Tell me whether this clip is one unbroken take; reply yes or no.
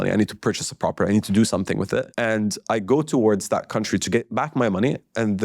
no